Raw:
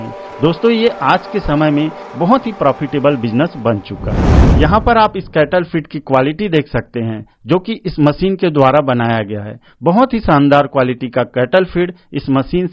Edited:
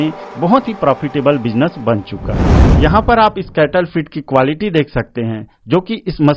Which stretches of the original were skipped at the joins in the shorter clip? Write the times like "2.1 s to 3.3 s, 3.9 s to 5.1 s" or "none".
none